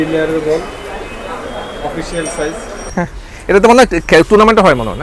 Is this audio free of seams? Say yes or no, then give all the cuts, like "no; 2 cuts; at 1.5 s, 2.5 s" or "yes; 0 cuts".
no; 1 cut; at 2.9 s